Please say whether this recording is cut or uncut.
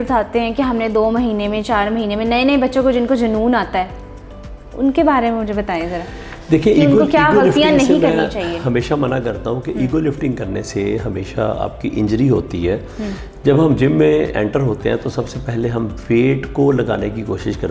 uncut